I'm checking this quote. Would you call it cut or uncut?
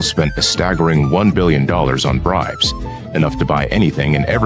uncut